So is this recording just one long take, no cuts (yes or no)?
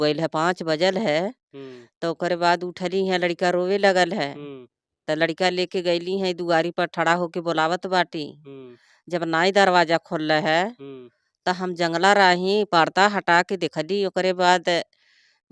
yes